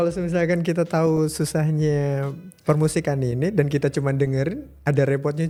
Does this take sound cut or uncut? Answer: uncut